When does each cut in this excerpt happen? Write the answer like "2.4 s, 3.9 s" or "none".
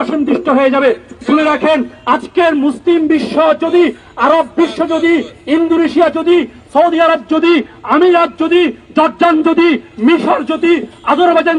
none